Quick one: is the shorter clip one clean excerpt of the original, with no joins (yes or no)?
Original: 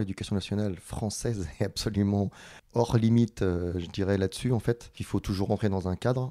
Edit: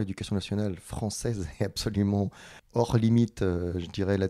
yes